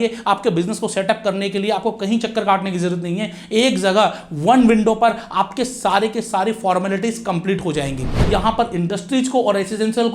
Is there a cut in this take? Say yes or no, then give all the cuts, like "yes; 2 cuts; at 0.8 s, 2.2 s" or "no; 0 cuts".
yes; 1 cut; at 8.2 s